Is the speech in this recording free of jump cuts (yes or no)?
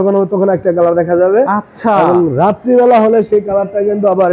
yes